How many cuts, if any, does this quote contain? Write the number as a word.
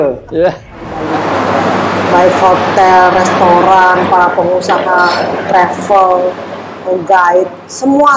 one